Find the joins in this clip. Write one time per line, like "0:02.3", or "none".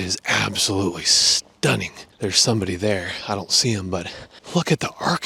none